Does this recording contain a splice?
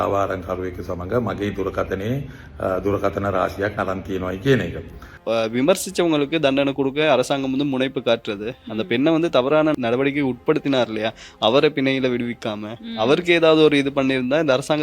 yes; 1 cut; at 5.1 s

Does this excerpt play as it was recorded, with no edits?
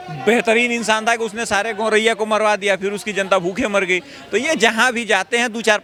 yes; 0 cuts

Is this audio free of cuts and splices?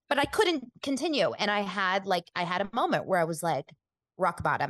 yes; 0 cuts

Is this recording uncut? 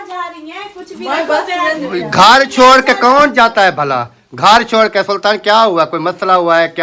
yes; 0 cuts

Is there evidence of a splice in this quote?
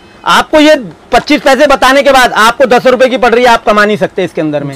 no; 0 cuts

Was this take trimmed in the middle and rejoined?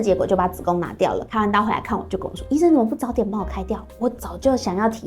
yes; 1 cut; at 1.3 s

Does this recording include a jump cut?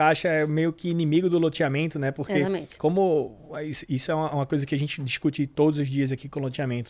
no; 0 cuts

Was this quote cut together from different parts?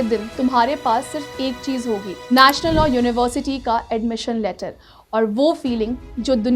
no; 0 cuts

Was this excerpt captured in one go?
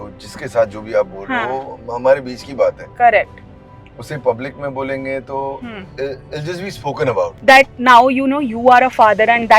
no; 1 cut; at 7.3 s

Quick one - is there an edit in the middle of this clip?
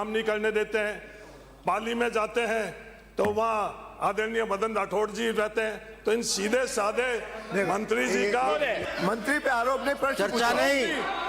yes; 1 cut; at 8.9 s

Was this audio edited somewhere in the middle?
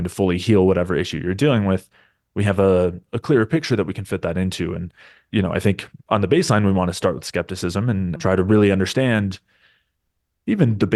no; 0 cuts

